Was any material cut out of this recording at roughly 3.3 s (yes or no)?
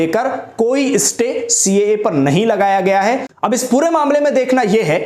yes